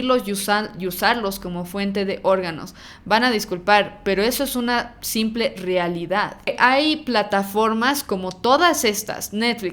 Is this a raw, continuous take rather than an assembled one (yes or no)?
no